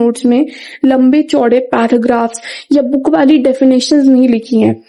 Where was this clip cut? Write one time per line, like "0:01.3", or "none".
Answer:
none